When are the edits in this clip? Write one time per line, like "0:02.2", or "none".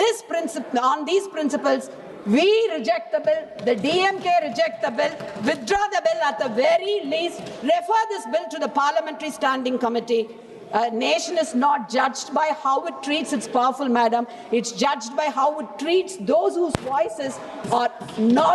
none